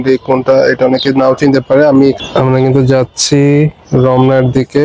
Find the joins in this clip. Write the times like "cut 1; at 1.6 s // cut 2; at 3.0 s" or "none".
cut 1; at 2.2 s

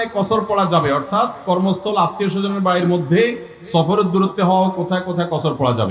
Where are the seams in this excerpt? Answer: none

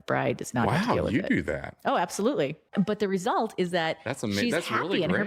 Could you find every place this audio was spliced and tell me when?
cut 1; at 2.6 s

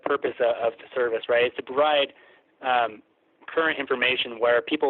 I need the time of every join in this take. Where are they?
none

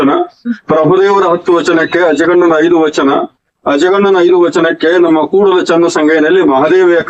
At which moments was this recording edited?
none

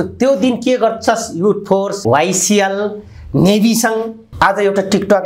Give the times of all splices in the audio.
cut 1; at 2.0 s // cut 2; at 4.3 s

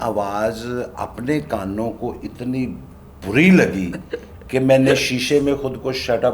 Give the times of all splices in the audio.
none

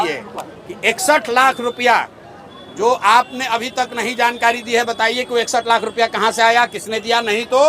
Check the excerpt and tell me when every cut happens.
none

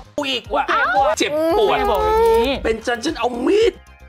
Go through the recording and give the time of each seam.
cut 1; at 1.1 s

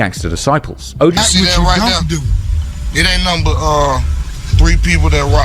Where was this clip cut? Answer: cut 1; at 1.2 s

